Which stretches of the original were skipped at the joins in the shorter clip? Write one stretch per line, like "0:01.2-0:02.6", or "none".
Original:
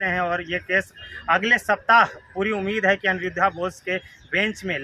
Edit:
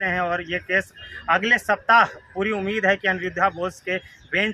none